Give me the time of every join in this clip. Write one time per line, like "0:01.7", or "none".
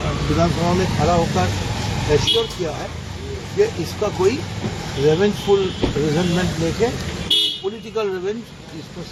none